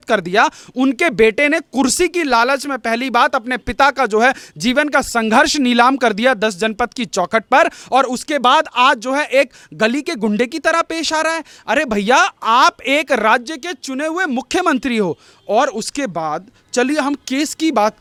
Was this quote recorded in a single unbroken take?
yes; 0 cuts

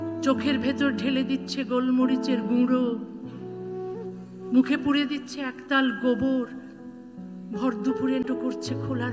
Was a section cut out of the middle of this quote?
yes; 1 cut; at 8.2 s

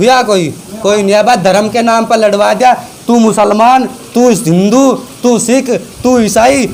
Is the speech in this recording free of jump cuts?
yes; 0 cuts

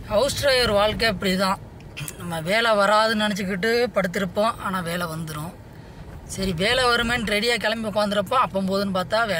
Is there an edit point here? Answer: no; 0 cuts

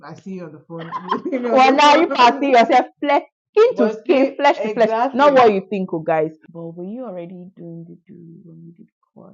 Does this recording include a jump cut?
yes; 1 cut; at 6.4 s

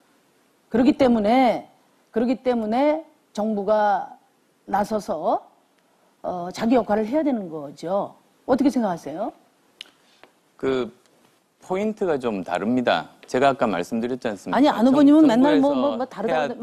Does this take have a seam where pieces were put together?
yes; 1 cut; at 5.1 s

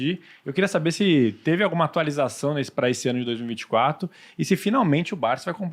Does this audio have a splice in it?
no; 0 cuts

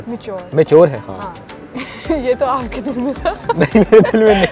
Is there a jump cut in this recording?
no; 0 cuts

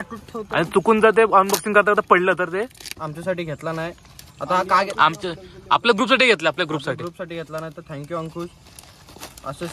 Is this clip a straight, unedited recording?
no; 1 cut; at 2.9 s

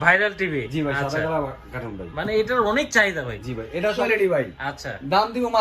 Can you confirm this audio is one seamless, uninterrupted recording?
no; 1 cut; at 4.1 s

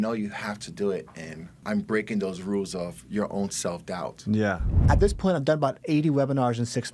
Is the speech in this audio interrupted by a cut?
yes; 2 cuts; at 1.6 s, 4.8 s

